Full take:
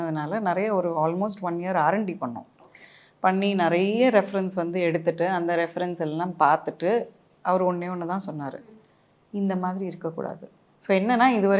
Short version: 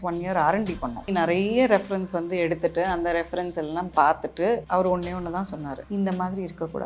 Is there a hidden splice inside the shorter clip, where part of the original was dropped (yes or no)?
yes